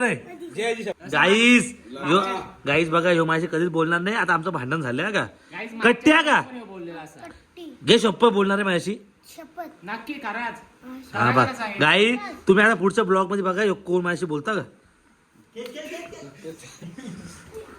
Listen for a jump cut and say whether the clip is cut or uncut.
cut